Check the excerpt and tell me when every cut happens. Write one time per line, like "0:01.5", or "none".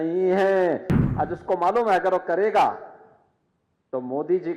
0:00.9